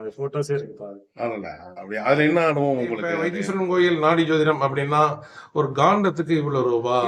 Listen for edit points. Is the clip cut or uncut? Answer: cut